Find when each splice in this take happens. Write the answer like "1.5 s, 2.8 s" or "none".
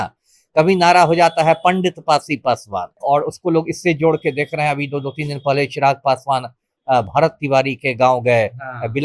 3.0 s